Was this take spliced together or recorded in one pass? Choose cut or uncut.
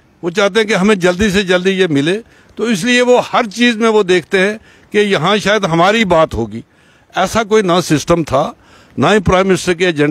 uncut